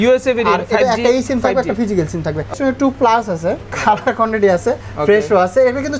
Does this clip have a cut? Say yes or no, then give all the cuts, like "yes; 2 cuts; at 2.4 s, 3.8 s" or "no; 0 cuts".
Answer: yes; 2 cuts; at 2.5 s, 3.7 s